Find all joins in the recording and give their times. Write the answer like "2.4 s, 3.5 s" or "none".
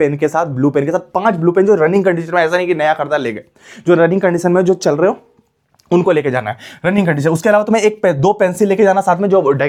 none